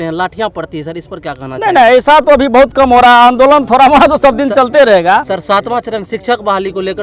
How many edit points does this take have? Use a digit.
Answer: 0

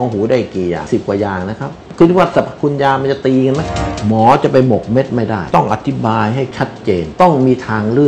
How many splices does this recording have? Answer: 3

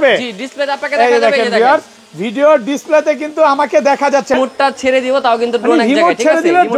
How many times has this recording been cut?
1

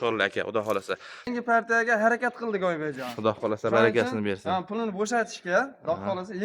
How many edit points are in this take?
1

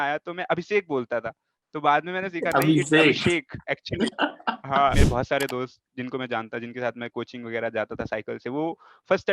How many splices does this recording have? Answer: 1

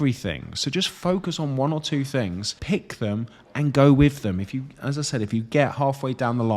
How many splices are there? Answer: 1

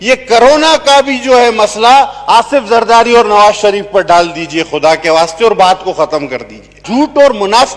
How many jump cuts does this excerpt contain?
1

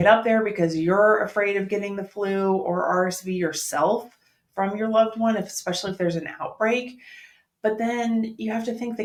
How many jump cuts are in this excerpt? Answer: 0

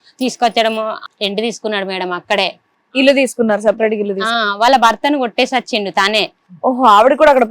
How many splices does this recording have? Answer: 1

